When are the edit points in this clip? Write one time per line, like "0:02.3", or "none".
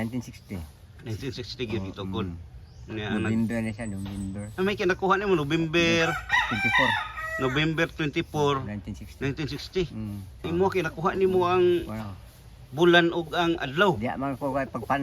0:10.4